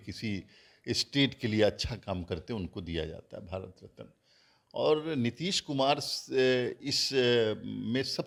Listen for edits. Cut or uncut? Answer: uncut